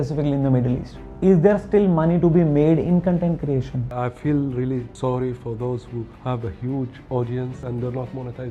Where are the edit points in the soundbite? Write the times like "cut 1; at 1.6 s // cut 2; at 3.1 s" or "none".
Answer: cut 1; at 1.0 s // cut 2; at 3.9 s // cut 3; at 4.9 s // cut 4; at 6.1 s // cut 5; at 7.6 s